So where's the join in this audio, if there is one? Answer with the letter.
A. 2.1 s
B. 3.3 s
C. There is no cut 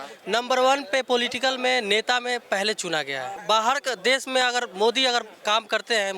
B